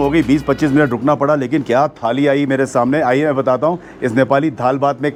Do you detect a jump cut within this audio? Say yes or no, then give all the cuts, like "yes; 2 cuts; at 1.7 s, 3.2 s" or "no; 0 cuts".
no; 0 cuts